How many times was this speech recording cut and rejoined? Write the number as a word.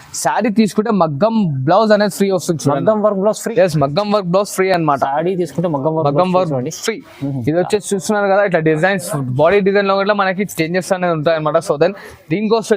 zero